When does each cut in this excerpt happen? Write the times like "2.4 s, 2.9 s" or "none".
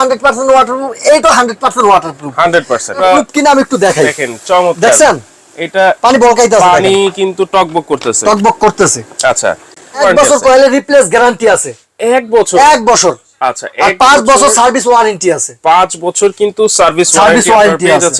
3.0 s, 10.0 s